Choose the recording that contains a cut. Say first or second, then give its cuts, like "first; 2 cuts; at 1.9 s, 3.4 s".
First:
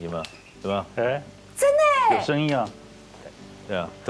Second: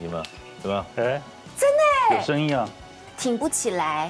second; 1 cut; at 3.1 s